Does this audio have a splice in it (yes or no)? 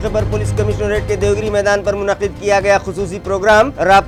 no